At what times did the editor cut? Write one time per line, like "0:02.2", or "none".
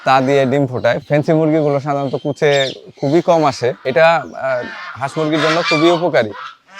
0:03.8